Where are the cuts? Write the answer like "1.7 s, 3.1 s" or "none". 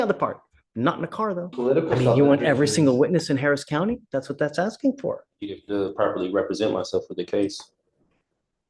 1.5 s